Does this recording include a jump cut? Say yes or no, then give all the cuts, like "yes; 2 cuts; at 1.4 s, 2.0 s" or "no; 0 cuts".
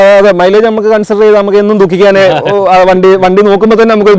no; 0 cuts